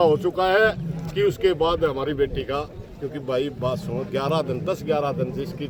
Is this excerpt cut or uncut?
uncut